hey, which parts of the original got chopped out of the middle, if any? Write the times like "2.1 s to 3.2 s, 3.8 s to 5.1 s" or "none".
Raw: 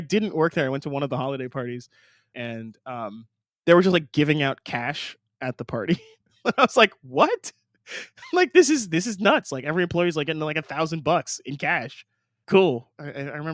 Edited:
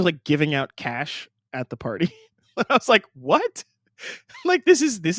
none